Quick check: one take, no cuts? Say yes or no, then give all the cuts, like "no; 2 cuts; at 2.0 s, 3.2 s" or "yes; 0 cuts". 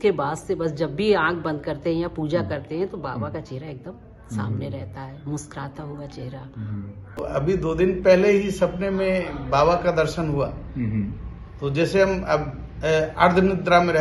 no; 1 cut; at 7.3 s